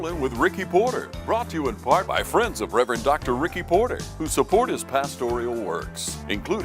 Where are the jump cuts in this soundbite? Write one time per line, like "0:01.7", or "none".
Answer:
0:01.1